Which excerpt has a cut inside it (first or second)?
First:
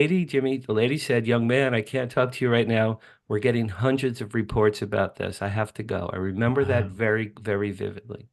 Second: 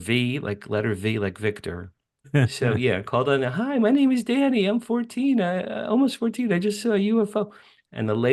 second